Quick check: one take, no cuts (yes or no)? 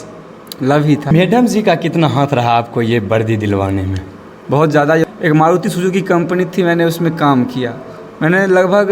no